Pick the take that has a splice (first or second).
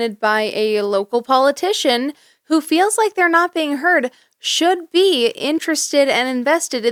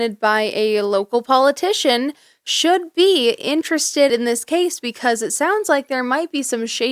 second